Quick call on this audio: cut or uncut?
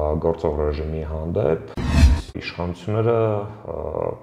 cut